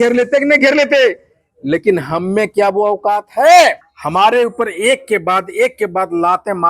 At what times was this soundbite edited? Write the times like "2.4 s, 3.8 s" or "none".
3.9 s